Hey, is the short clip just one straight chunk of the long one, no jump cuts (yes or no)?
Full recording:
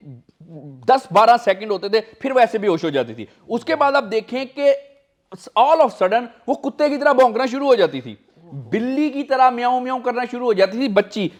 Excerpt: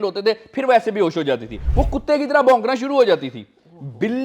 no